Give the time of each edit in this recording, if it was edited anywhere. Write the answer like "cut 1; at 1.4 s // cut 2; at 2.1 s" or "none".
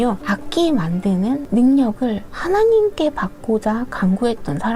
none